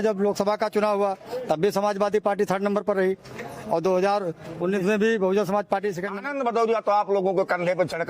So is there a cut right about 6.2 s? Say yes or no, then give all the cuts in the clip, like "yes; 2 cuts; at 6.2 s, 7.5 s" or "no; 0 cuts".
yes; 1 cut; at 6.2 s